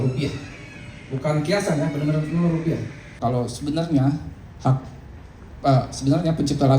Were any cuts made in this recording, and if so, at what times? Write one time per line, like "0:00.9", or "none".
0:03.1